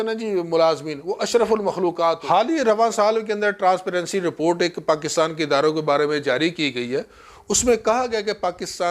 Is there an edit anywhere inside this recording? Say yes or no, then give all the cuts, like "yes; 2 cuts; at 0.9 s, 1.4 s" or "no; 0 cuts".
yes; 1 cut; at 2.2 s